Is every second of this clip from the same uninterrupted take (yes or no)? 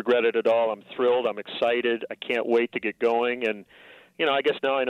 yes